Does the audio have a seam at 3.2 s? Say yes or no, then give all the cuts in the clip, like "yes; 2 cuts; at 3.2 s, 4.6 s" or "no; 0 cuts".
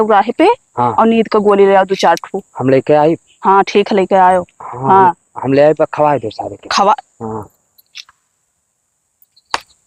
no; 0 cuts